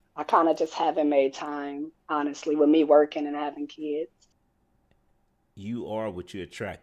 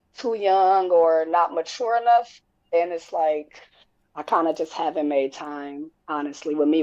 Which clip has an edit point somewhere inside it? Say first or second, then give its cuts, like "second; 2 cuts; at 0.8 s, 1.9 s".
first; 1 cut; at 4.2 s